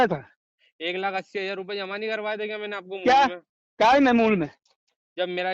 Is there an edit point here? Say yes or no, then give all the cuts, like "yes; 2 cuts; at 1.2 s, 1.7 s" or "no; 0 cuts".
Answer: no; 0 cuts